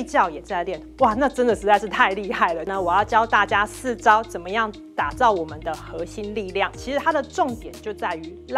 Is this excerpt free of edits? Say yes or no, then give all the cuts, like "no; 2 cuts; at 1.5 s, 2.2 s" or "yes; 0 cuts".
no; 2 cuts; at 2.7 s, 6.8 s